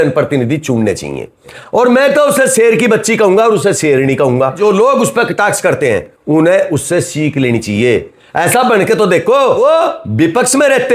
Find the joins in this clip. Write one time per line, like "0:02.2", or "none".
0:01.6
0:04.6
0:09.6